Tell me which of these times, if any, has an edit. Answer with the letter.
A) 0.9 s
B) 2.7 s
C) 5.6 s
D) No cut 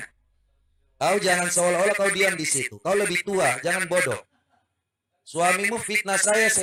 D